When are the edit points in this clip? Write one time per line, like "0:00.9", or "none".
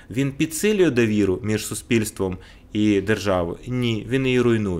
none